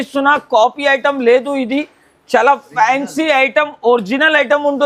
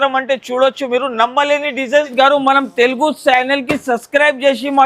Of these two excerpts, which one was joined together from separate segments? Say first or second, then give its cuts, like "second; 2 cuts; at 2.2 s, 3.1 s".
second; 1 cut; at 2.1 s